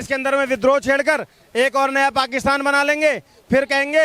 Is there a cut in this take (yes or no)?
no